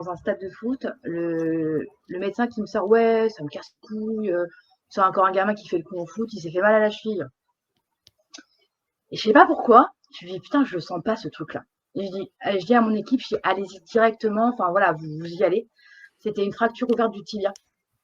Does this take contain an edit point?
no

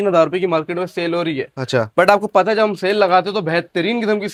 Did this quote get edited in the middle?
no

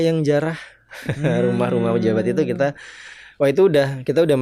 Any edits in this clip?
no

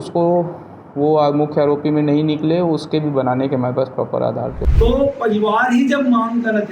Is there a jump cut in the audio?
yes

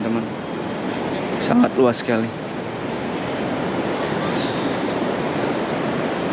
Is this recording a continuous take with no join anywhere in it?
yes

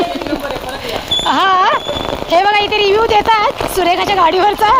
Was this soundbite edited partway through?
no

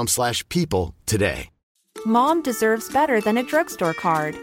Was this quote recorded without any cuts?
no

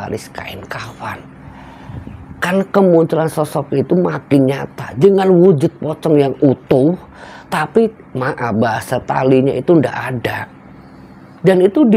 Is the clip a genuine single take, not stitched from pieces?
yes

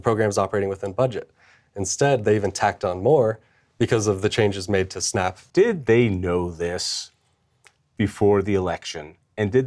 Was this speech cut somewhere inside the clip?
yes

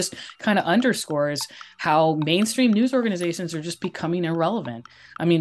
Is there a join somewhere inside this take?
no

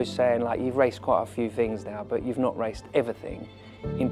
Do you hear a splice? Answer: no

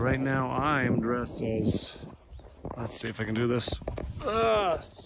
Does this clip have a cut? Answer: no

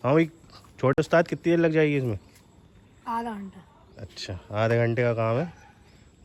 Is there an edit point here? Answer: no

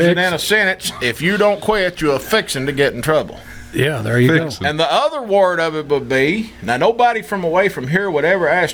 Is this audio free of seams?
yes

